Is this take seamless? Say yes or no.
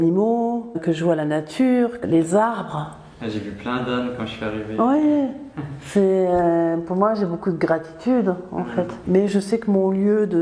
no